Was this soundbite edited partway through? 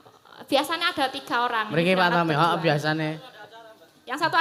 no; 0 cuts

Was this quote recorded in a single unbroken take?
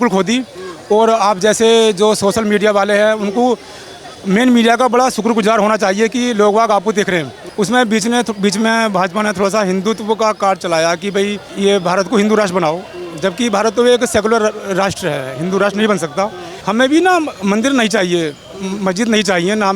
no; 3 cuts; at 7.4 s, 11.4 s, 16.5 s

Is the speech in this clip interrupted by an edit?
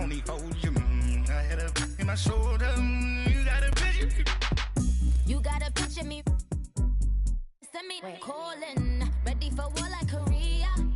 yes; 1 cut; at 3.7 s

